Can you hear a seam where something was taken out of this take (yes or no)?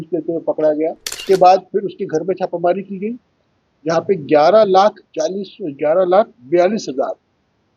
yes